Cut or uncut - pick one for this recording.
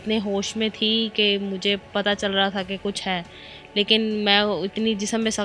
uncut